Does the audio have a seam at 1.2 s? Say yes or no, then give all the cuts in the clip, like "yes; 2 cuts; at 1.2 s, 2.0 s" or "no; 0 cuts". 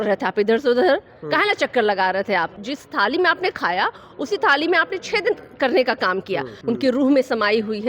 no; 2 cuts; at 2.6 s, 6.5 s